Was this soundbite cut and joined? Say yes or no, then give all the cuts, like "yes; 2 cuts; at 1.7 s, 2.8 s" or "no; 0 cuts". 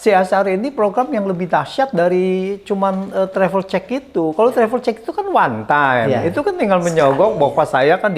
no; 0 cuts